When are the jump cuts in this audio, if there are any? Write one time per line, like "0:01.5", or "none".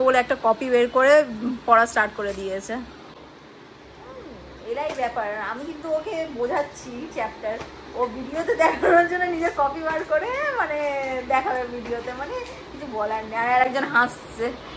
none